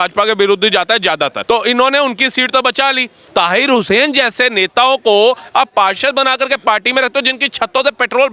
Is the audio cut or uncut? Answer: cut